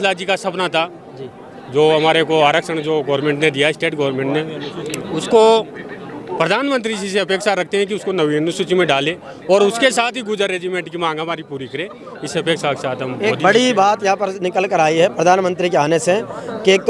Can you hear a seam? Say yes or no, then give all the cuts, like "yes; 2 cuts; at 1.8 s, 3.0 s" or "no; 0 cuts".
no; 0 cuts